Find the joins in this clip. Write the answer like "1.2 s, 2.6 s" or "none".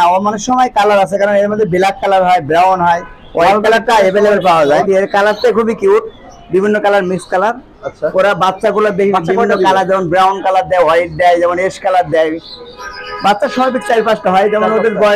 4.8 s